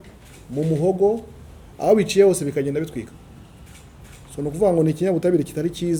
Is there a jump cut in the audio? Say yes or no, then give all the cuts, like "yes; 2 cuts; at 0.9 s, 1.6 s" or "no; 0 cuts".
no; 0 cuts